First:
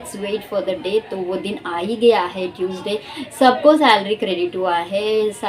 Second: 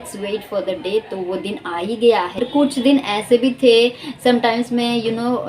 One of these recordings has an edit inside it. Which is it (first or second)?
second